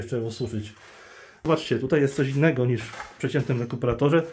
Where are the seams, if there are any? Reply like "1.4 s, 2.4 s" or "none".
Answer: 1.5 s